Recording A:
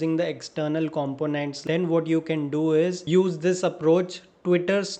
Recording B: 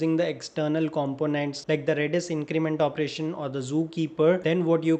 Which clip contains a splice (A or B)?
A